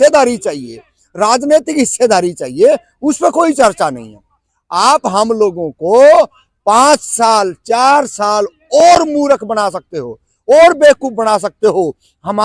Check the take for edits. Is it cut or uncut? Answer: uncut